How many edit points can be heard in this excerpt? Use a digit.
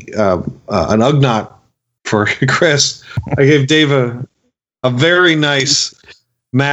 1